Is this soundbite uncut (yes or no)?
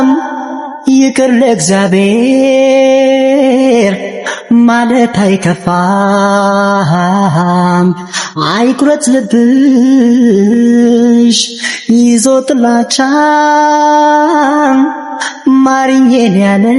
yes